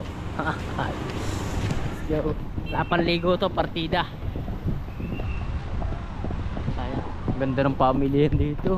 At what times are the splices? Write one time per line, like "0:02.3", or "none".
none